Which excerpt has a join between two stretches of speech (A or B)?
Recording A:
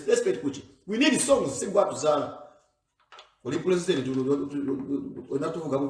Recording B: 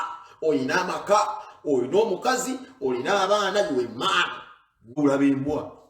B